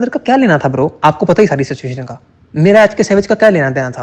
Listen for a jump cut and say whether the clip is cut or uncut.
uncut